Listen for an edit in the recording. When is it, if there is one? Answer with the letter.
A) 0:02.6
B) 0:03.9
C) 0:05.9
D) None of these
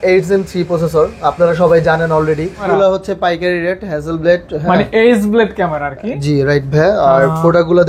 A